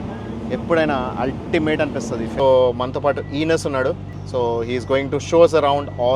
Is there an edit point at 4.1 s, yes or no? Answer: yes